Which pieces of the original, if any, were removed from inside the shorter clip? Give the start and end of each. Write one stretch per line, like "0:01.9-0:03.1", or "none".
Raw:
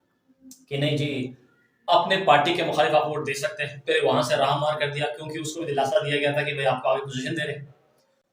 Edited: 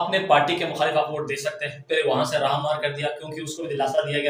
none